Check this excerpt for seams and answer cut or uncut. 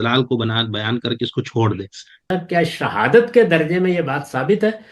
cut